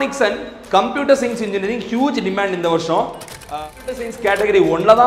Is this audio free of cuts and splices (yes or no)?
no